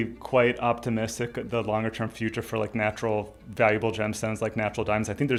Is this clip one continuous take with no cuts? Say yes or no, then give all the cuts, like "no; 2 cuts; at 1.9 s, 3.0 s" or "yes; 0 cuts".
yes; 0 cuts